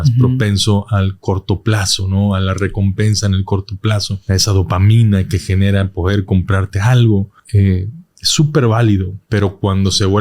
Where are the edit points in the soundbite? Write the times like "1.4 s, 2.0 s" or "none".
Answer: 4.1 s, 7.4 s, 9.2 s